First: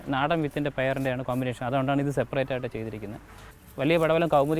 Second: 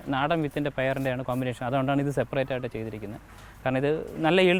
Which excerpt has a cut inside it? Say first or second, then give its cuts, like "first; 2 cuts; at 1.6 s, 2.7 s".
first; 1 cut; at 3.5 s